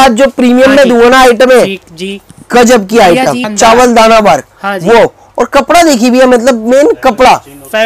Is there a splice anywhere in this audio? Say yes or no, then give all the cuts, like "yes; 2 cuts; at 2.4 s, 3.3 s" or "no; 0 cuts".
yes; 1 cut; at 3.5 s